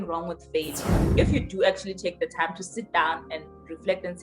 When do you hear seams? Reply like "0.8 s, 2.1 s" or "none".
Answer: 1.1 s